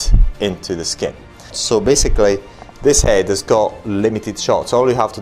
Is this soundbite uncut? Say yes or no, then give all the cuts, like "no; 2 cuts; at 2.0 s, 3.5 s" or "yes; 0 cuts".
no; 1 cut; at 1.6 s